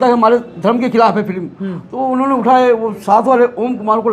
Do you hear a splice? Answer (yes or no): no